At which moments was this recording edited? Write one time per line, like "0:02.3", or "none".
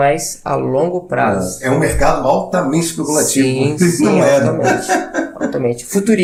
none